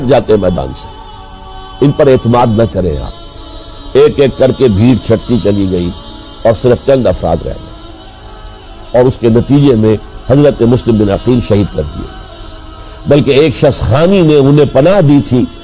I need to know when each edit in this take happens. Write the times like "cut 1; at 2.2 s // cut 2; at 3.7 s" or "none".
cut 1; at 3.7 s